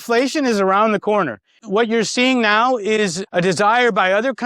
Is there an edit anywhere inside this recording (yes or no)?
yes